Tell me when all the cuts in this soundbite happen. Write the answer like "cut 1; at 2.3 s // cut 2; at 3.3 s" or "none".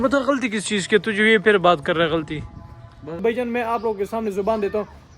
cut 1; at 3.2 s

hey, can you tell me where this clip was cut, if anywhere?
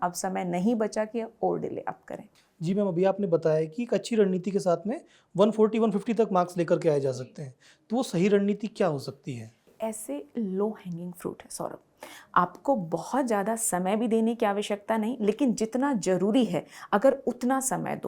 none

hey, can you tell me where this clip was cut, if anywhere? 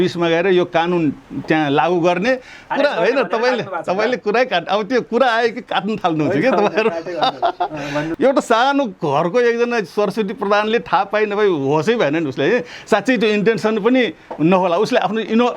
cut 1; at 2.7 s // cut 2; at 8.1 s

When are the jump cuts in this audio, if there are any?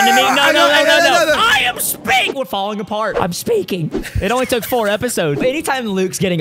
cut 1; at 3.1 s // cut 2; at 5.4 s

